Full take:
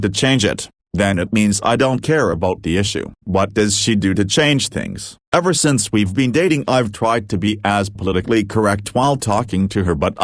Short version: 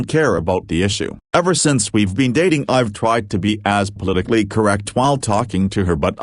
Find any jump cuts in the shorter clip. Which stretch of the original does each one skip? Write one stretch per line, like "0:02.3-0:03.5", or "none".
0:03.1-0:05.1